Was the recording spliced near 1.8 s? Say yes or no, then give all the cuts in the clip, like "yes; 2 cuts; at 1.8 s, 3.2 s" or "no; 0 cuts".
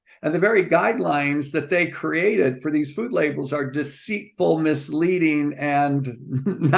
no; 0 cuts